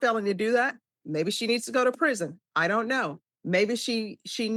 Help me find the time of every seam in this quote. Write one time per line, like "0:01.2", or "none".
none